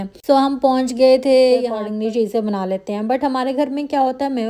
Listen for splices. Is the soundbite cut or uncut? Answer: cut